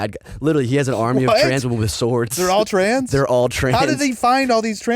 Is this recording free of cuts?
yes; 0 cuts

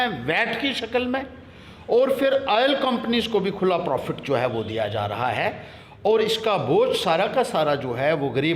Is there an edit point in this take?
no; 0 cuts

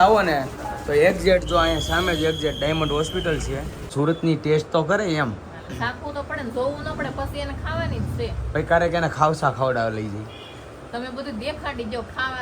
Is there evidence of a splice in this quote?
yes; 1 cut; at 3.9 s

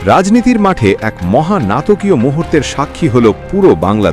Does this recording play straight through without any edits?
yes; 0 cuts

